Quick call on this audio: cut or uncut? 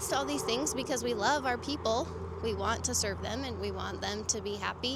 uncut